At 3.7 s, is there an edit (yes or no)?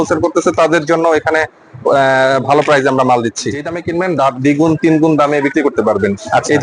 yes